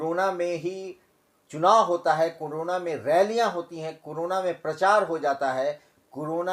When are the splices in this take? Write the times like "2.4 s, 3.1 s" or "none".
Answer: none